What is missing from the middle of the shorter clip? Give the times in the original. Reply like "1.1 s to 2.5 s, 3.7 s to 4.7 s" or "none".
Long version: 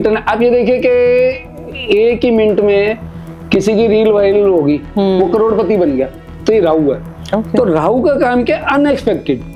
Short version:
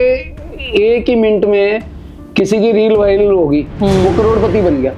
none